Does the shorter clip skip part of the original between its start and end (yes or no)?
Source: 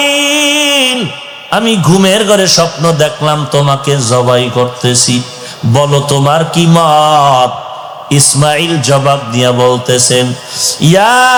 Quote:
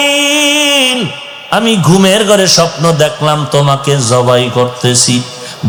no